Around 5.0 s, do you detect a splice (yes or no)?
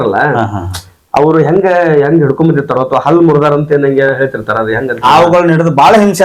yes